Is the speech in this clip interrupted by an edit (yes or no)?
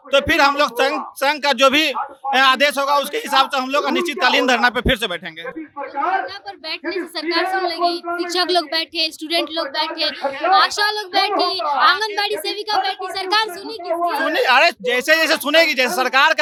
no